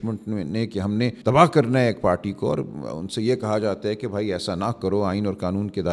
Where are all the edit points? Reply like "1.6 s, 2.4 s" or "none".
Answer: 1.2 s